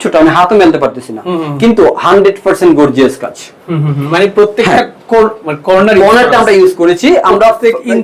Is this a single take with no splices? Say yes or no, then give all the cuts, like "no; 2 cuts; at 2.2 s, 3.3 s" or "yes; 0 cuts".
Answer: yes; 0 cuts